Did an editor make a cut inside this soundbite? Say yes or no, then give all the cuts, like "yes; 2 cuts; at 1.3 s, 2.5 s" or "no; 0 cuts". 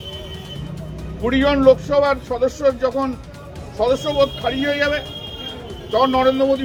no; 0 cuts